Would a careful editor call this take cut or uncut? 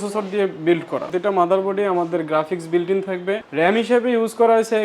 cut